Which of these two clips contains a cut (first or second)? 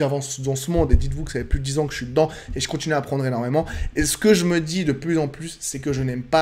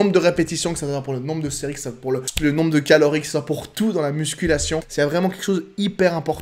second